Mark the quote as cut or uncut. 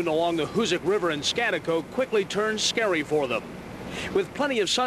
cut